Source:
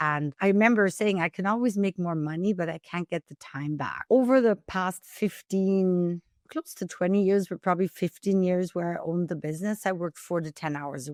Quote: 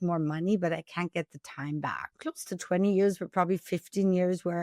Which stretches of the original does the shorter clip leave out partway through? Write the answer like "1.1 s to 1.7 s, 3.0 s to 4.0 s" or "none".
3.9 s to 6.3 s